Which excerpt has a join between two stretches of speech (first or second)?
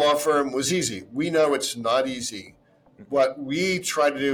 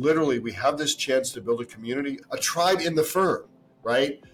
second